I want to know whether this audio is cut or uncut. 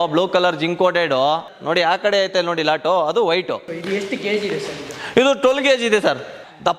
cut